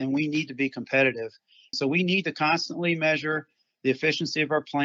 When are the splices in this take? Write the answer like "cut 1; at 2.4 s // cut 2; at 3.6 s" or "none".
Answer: cut 1; at 1.7 s

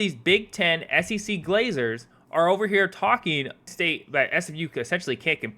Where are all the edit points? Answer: cut 1; at 3.6 s

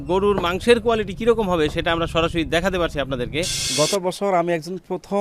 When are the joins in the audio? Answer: cut 1; at 3.6 s

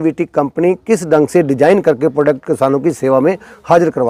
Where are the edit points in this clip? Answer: none

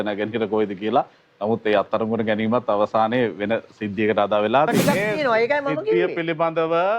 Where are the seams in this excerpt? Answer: cut 1; at 4.8 s

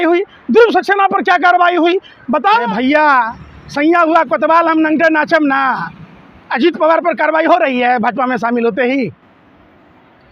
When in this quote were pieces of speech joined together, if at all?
cut 1; at 2.6 s

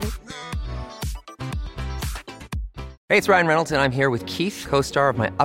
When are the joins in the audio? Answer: cut 1; at 2.9 s

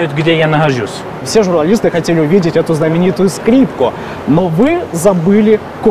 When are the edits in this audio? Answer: cut 1; at 1.2 s

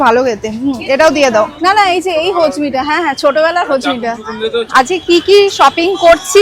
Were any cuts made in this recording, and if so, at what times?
cut 1; at 1.5 s // cut 2; at 4.7 s

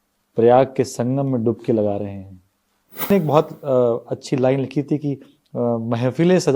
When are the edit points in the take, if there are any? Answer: cut 1; at 3.1 s

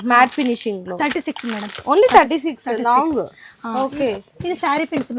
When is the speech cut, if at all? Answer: none

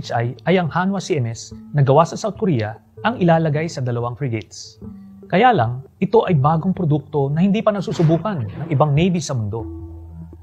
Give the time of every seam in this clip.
cut 1; at 5.1 s

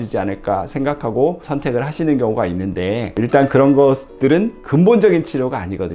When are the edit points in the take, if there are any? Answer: cut 1; at 1.4 s

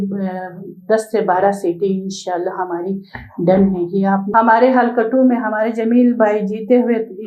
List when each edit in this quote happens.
cut 1; at 4.3 s

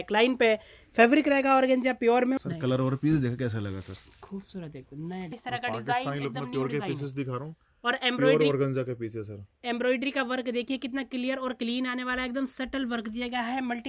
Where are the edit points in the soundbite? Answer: cut 1; at 2.4 s // cut 2; at 5.4 s

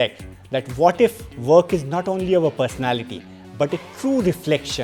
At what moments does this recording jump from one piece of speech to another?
none

